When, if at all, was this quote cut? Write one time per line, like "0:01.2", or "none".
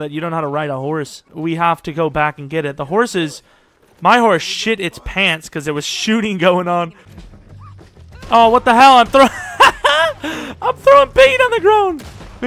0:01.2
0:07.1